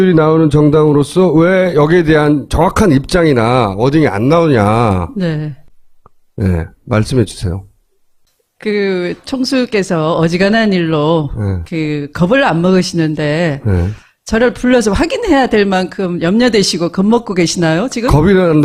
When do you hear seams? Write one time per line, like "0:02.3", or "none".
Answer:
none